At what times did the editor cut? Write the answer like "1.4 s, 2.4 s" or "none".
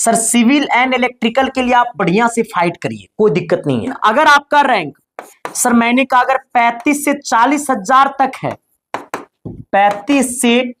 4.0 s